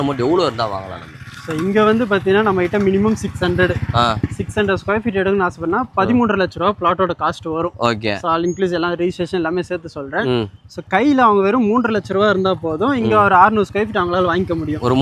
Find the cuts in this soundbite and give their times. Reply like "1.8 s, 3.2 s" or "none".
none

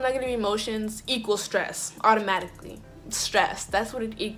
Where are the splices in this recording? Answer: none

